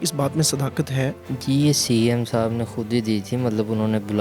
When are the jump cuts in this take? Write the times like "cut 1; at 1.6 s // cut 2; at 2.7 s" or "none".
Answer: cut 1; at 1.2 s